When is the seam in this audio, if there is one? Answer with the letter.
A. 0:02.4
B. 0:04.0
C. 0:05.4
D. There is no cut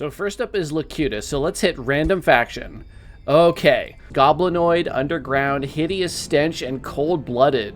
B